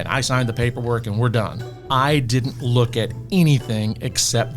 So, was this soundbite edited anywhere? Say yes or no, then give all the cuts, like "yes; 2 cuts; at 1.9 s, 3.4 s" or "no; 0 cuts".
yes; 1 cut; at 1.8 s